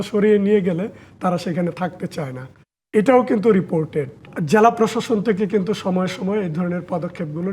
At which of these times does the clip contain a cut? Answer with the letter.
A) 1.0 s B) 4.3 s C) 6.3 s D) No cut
B